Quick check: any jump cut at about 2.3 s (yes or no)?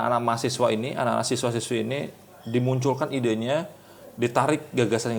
no